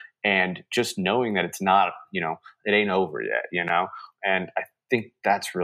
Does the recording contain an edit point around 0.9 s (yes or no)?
no